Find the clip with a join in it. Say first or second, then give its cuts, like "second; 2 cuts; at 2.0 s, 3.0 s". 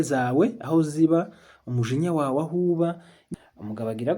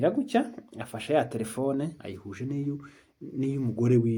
first; 1 cut; at 3.1 s